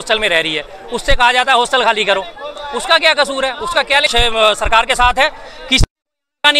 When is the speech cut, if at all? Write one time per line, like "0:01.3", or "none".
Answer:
0:04.1